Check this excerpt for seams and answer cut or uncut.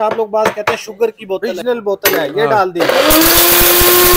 cut